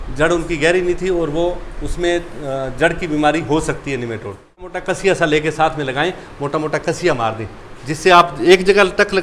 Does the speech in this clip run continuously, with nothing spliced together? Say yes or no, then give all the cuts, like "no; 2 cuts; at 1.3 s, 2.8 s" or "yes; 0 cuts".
no; 1 cut; at 4.7 s